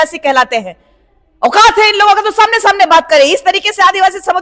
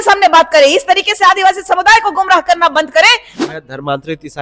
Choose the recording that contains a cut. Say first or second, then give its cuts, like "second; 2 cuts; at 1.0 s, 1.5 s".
second; 1 cut; at 3.3 s